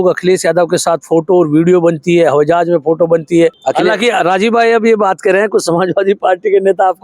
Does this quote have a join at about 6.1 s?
no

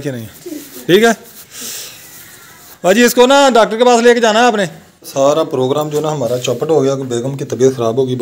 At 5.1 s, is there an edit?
yes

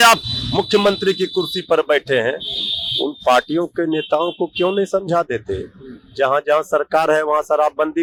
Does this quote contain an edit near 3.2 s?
no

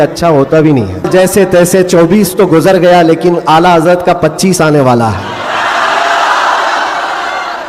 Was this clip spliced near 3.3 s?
no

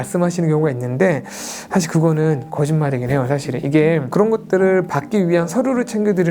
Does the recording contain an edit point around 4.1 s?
yes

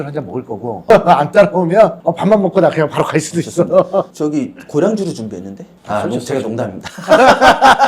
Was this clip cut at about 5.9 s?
no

